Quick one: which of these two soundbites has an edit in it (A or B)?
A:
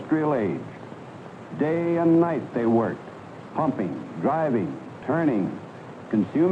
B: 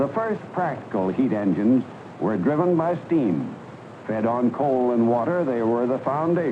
B